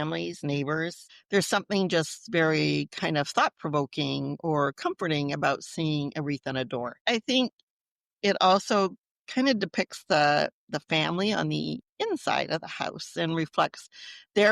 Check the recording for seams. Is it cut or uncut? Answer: cut